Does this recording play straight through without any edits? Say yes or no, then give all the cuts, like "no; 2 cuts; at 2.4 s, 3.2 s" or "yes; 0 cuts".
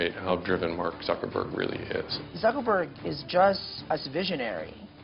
no; 2 cuts; at 2.2 s, 3.7 s